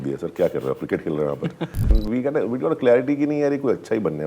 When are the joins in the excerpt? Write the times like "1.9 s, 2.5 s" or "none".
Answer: 2.0 s